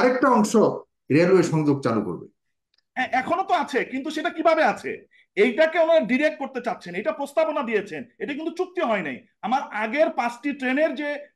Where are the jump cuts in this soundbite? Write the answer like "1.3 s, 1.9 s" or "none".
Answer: none